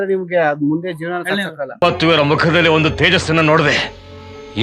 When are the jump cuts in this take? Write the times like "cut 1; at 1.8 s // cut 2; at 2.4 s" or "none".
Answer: cut 1; at 1.8 s